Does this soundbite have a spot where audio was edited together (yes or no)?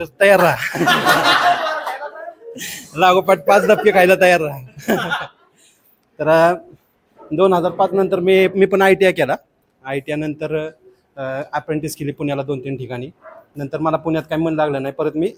no